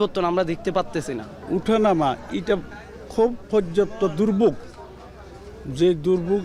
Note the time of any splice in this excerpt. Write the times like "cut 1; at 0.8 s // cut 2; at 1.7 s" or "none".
none